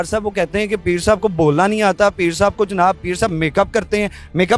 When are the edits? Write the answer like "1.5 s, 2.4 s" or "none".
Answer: none